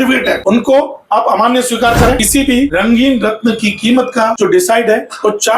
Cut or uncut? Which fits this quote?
cut